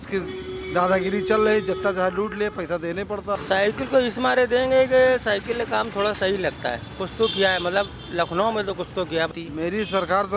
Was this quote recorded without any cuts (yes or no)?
no